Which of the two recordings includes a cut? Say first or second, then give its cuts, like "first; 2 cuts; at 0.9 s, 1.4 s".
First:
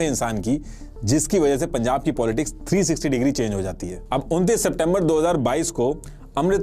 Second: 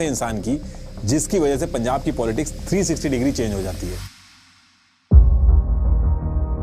first; 1 cut; at 3.9 s